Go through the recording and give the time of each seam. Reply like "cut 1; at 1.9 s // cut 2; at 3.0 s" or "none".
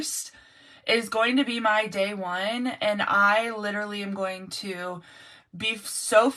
none